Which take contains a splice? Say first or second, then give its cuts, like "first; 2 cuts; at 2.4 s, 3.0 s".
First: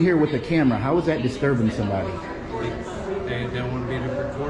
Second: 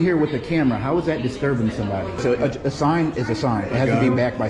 second; 1 cut; at 2.2 s